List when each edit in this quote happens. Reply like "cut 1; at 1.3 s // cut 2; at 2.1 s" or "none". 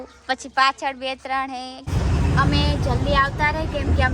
cut 1; at 1.9 s